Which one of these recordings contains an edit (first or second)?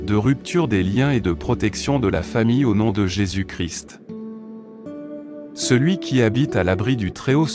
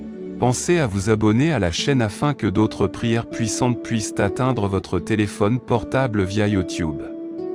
first